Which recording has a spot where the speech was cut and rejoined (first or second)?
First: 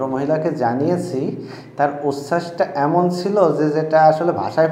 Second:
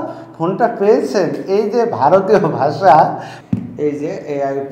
second